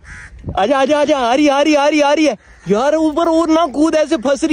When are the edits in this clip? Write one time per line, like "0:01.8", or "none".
none